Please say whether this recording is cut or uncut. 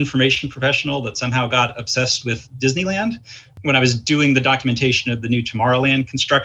uncut